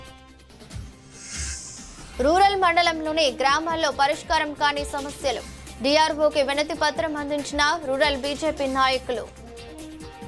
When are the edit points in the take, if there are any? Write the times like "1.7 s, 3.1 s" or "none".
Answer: 1.0 s, 2.2 s, 9.4 s